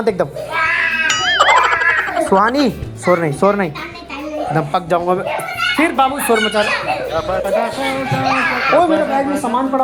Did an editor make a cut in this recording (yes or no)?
no